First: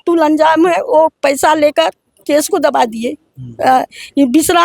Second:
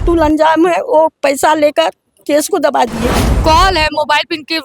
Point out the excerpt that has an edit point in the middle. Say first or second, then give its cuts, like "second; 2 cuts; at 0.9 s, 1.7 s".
second; 1 cut; at 3.3 s